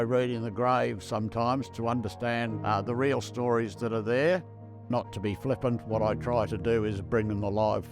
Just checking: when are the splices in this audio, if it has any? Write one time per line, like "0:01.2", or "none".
0:02.5
0:04.9